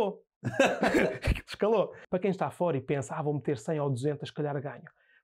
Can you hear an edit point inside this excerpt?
yes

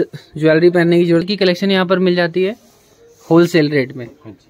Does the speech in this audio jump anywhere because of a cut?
yes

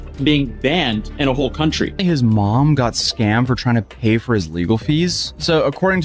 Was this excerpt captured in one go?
no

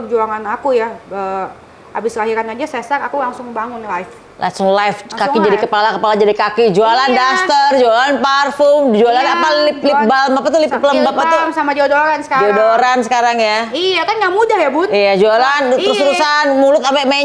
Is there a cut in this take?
no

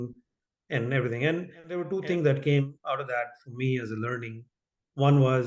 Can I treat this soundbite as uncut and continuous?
no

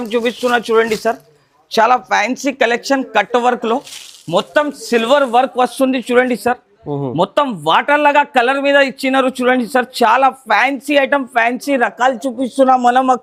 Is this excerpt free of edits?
yes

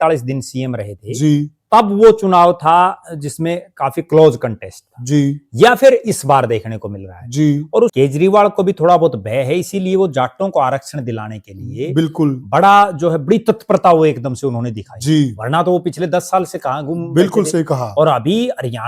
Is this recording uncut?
no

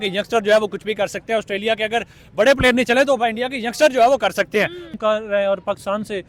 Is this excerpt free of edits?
no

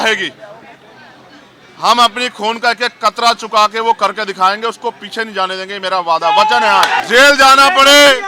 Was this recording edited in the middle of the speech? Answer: yes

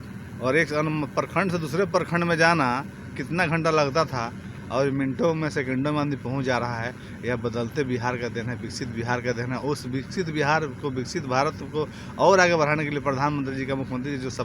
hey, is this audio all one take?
yes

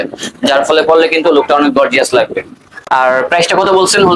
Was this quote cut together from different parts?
no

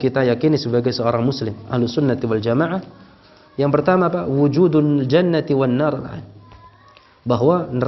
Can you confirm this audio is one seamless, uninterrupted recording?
yes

